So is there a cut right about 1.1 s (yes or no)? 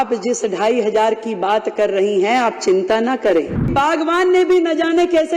no